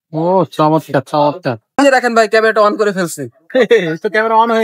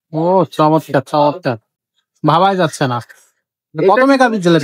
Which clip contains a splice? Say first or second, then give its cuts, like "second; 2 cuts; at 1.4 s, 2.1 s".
first; 1 cut; at 1.8 s